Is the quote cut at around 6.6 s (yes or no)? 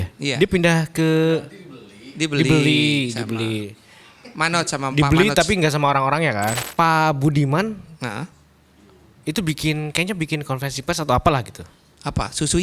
yes